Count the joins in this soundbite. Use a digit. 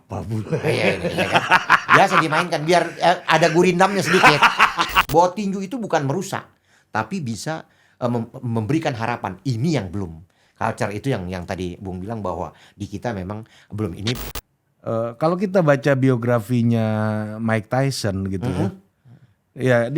2